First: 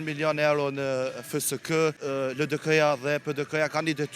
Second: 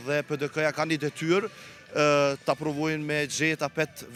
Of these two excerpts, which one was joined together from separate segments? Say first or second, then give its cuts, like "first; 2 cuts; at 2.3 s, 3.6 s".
first; 1 cut; at 2.0 s